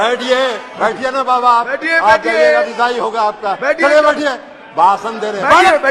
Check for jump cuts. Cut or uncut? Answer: uncut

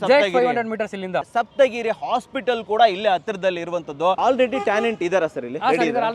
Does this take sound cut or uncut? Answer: cut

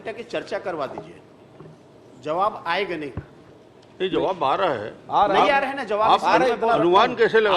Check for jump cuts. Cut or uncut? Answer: uncut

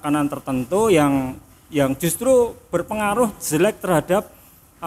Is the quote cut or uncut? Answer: uncut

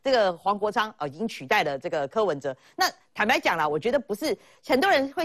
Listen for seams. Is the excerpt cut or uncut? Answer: uncut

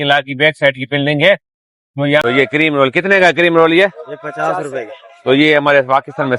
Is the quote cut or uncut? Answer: cut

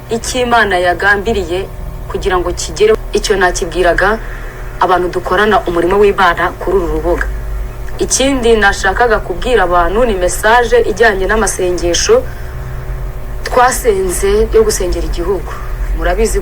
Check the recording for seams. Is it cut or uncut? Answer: cut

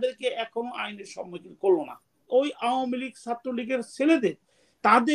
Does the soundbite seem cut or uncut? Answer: cut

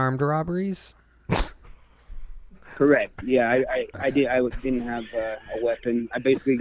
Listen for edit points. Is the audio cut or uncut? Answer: uncut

